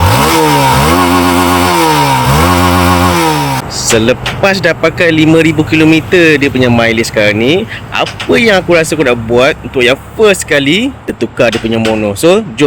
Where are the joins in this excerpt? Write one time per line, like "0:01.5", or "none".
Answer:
0:03.6
0:11.1